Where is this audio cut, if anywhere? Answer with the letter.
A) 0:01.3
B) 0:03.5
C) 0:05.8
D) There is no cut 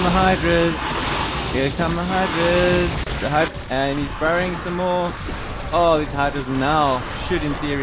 B